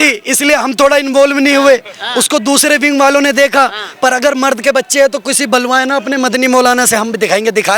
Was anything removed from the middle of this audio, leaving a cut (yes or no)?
no